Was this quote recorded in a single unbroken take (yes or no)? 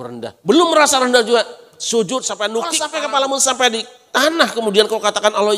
no